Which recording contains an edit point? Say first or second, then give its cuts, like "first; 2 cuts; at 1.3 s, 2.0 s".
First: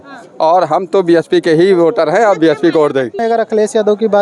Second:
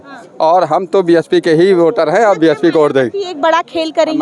first; 1 cut; at 3.2 s